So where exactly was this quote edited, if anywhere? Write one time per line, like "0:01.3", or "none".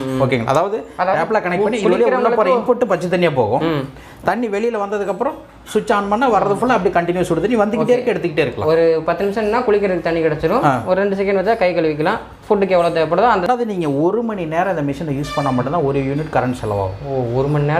0:13.5